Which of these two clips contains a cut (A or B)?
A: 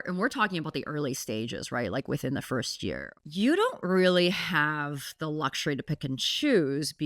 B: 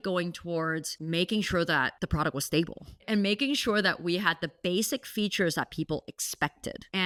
A